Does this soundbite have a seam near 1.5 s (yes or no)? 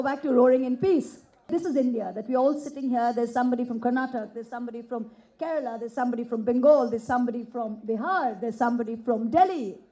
yes